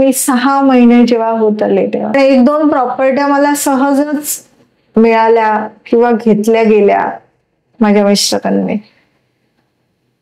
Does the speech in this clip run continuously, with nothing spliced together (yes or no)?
no